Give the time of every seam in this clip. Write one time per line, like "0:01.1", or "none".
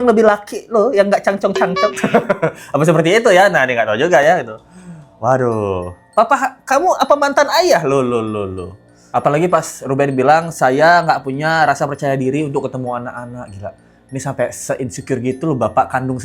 none